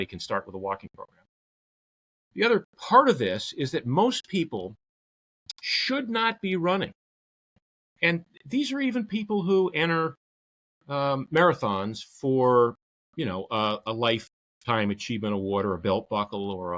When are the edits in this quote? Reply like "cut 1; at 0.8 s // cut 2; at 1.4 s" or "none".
none